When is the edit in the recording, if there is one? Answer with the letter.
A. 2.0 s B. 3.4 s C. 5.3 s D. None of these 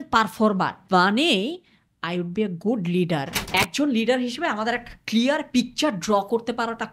B